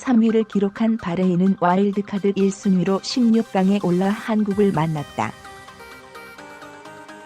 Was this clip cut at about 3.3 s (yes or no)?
no